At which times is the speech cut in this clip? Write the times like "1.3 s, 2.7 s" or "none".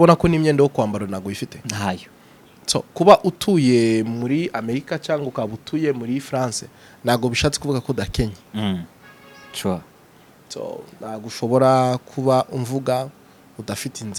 none